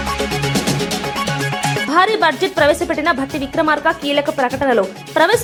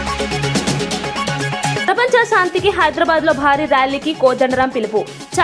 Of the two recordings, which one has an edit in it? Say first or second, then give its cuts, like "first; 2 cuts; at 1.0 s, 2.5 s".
second; 1 cut; at 1.8 s